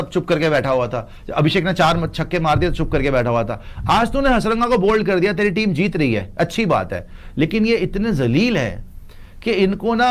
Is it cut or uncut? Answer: uncut